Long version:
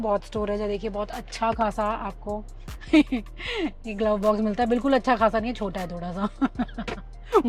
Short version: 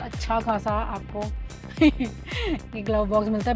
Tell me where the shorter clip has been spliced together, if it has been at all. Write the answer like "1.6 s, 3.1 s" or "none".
none

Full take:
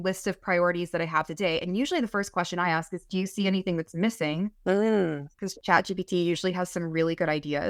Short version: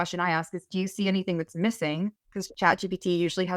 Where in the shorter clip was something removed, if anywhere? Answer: 2.2 s

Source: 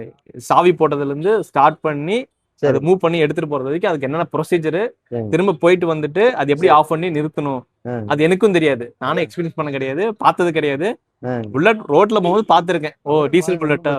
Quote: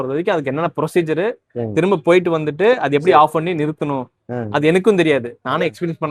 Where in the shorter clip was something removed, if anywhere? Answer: none

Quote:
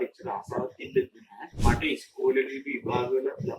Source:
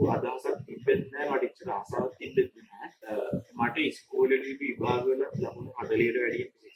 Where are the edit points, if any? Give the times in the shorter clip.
1.5 s

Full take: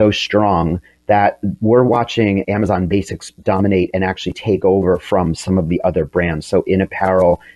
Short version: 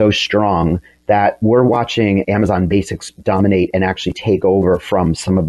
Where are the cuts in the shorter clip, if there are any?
1.4 s

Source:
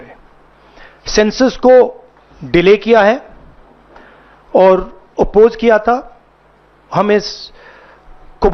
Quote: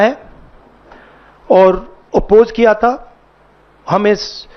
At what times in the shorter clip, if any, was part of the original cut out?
none

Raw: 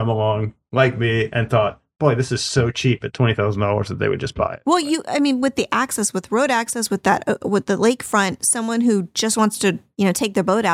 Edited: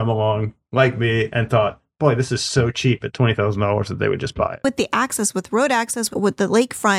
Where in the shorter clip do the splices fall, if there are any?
4.6 s, 6.1 s

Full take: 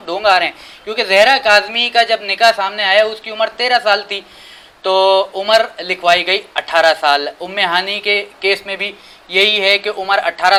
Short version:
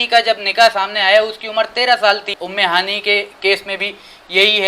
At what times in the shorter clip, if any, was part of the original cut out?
2.4 s

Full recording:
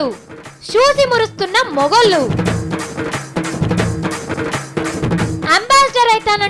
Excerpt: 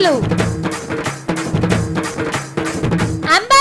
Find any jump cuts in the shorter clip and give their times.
2.2 s

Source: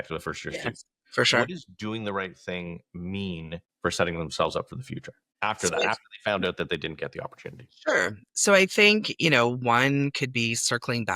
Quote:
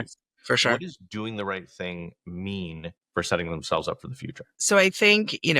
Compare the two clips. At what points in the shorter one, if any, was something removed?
4.5 s

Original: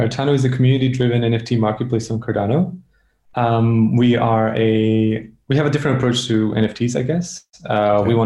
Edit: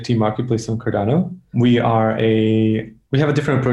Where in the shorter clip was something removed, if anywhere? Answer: 1.6 s

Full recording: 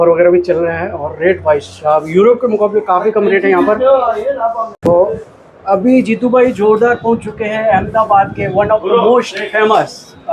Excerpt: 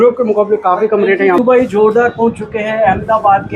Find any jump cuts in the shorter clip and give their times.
1.4 s

